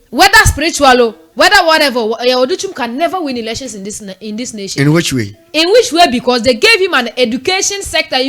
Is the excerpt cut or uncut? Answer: uncut